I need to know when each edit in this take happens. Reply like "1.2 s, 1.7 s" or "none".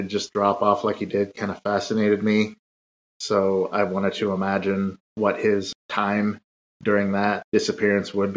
5.3 s, 7.4 s